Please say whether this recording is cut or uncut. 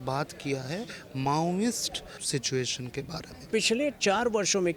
cut